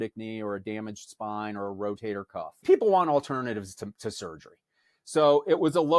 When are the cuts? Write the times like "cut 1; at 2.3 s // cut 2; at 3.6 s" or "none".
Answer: cut 1; at 2.6 s